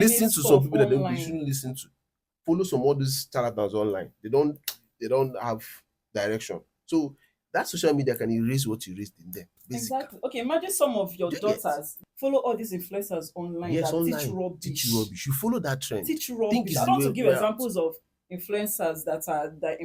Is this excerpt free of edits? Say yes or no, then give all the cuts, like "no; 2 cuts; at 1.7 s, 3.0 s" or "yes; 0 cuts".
no; 1 cut; at 11.9 s